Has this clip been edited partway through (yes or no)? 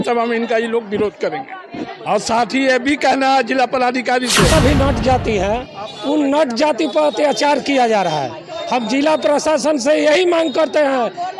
yes